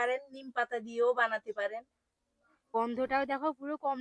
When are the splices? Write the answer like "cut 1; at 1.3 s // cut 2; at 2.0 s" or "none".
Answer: cut 1; at 2.7 s